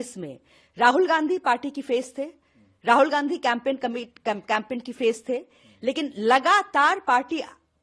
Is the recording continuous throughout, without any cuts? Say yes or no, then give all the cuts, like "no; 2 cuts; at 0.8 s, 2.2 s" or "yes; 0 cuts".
yes; 0 cuts